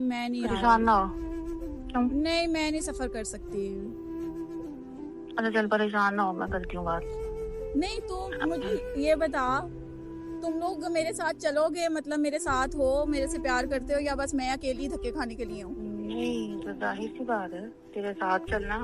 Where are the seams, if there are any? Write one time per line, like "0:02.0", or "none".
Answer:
0:07.2